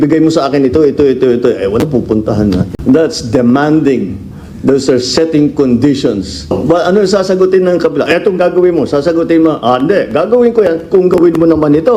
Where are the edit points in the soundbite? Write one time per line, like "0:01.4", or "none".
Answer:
0:02.7
0:06.5

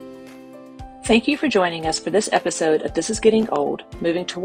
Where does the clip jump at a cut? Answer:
0:01.1

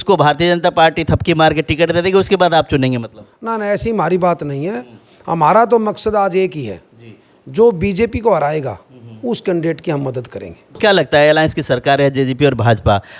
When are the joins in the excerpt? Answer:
0:10.8

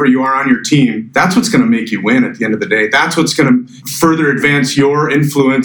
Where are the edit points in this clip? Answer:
0:01.0
0:03.8

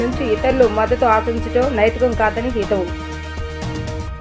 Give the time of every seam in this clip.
none

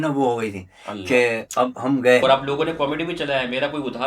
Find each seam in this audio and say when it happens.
0:02.2

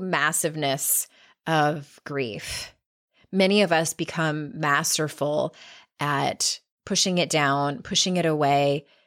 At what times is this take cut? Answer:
none

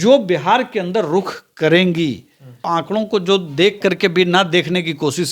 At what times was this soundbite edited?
0:02.6

